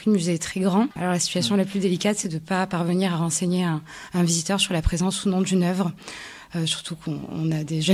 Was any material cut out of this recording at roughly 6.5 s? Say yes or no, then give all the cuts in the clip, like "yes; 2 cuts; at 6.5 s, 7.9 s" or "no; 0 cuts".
no; 1 cut; at 0.9 s